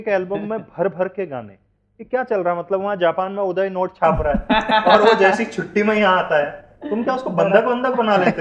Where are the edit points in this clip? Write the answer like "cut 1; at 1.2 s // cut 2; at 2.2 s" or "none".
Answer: none